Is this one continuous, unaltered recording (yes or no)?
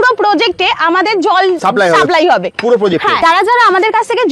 no